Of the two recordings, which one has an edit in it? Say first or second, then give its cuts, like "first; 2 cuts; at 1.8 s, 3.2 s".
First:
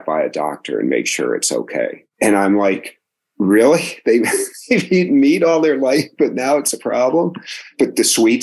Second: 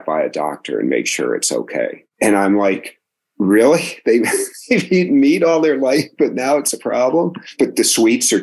second; 1 cut; at 7.4 s